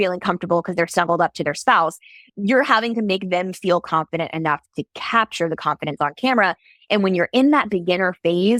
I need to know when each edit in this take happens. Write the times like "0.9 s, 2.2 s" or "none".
none